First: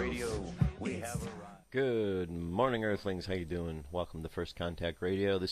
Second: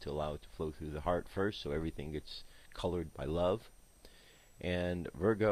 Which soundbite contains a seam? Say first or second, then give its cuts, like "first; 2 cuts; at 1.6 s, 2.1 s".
first; 1 cut; at 4.2 s